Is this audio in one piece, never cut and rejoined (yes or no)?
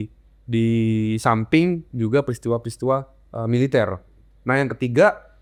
yes